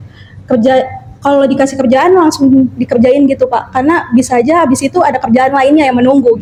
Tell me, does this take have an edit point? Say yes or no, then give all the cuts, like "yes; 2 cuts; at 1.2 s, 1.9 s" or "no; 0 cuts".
no; 0 cuts